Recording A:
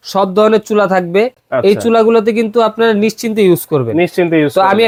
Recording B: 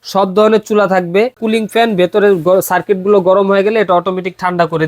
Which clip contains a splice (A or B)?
B